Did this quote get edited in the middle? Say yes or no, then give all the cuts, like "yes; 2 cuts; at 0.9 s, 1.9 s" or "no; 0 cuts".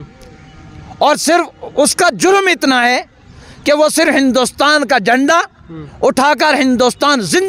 no; 0 cuts